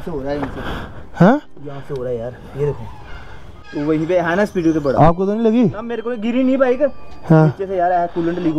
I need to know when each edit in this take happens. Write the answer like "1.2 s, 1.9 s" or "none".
3.6 s